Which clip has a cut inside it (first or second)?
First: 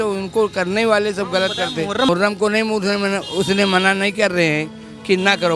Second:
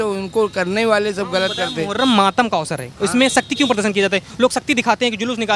first